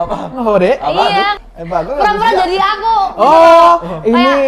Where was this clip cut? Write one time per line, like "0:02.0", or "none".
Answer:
0:01.4